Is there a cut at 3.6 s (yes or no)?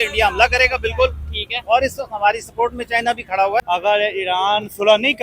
yes